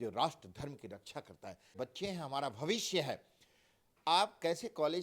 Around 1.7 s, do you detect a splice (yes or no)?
yes